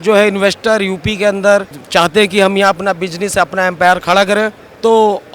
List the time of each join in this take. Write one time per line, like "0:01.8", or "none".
none